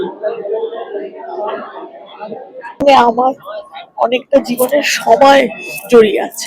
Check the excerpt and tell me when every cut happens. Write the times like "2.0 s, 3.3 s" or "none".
2.8 s